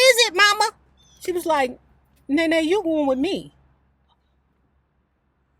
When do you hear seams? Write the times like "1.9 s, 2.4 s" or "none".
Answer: 0.9 s